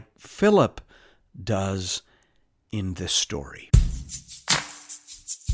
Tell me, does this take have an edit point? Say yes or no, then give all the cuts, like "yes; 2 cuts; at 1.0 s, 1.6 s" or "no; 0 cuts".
yes; 1 cut; at 3.6 s